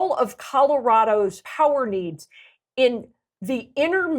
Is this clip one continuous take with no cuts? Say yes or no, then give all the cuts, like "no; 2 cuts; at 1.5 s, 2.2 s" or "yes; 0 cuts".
no; 1 cut; at 1.4 s